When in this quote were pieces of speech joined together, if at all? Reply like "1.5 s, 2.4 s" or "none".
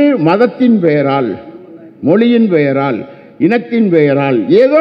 none